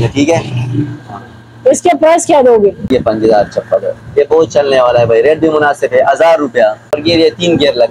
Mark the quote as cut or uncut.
cut